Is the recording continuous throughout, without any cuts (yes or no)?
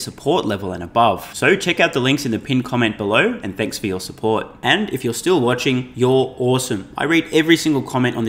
yes